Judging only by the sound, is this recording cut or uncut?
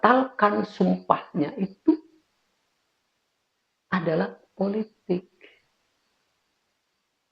uncut